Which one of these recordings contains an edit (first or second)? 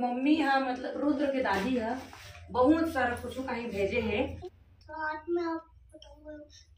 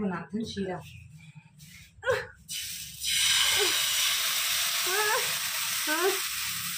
first